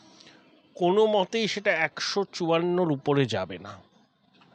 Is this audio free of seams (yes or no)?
yes